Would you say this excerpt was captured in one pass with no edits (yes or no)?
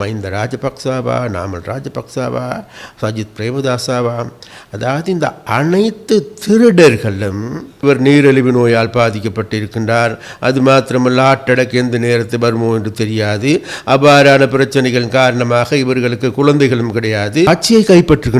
no